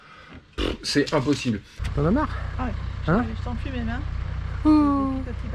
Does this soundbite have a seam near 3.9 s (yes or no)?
no